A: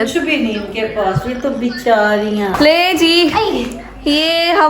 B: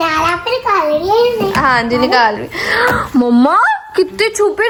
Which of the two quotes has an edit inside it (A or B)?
A